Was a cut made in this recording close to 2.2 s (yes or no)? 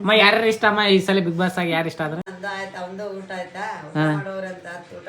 yes